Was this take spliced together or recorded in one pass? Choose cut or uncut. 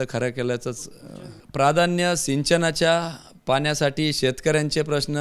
cut